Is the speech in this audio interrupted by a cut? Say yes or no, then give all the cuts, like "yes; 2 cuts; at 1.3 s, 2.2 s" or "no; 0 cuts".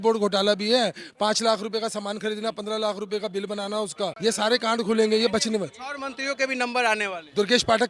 no; 0 cuts